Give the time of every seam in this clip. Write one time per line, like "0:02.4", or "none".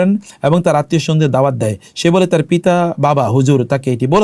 none